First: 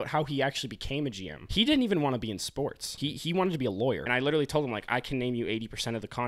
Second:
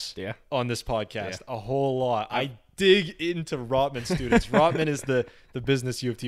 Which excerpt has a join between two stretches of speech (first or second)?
first